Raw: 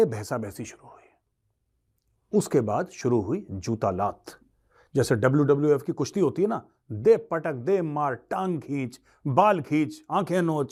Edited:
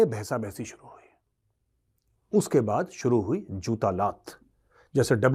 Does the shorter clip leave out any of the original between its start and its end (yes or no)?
no